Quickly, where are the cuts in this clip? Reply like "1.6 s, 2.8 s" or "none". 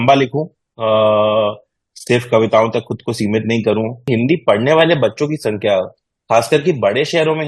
4.1 s